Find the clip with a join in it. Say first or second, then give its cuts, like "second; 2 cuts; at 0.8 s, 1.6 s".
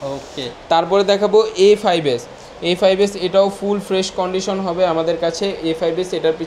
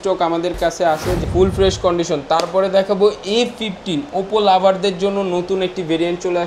second; 1 cut; at 1.2 s